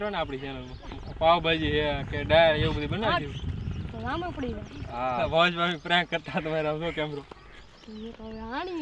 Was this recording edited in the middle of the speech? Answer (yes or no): yes